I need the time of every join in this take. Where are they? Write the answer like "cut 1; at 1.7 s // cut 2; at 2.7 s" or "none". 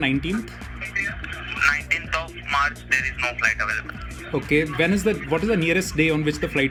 none